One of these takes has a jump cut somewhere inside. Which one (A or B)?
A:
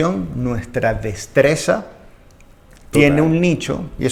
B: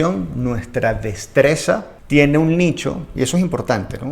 B